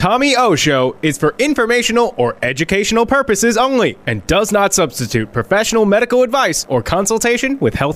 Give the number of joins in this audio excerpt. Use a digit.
0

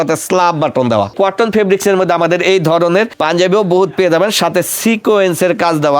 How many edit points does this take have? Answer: 2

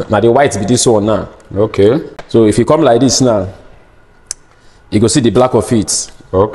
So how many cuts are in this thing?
1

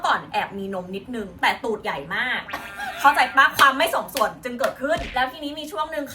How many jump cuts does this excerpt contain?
0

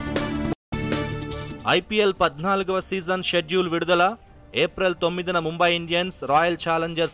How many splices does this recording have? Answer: 1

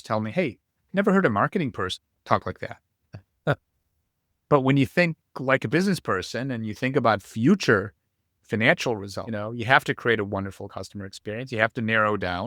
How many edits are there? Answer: 2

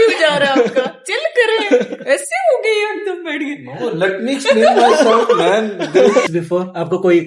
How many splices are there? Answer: 1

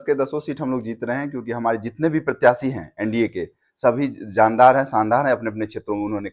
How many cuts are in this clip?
0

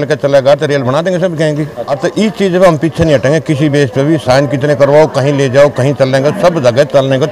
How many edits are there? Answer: 1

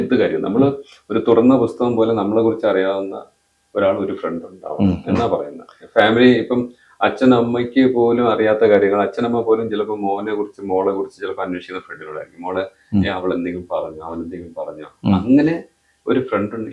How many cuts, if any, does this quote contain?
0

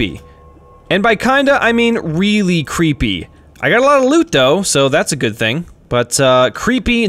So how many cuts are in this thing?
1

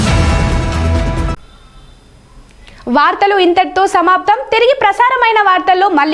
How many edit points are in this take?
0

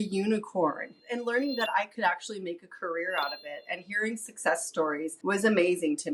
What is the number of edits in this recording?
1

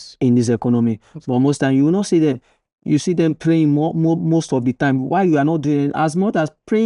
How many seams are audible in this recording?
0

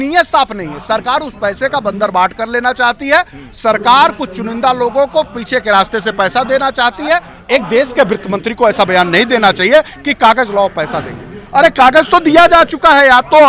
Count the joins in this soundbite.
1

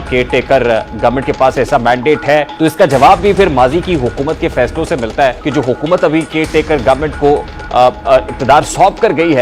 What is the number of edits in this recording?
2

